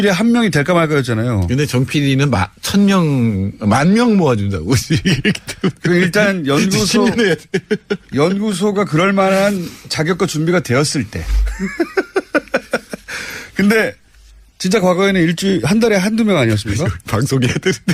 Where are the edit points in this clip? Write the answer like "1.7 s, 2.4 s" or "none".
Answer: none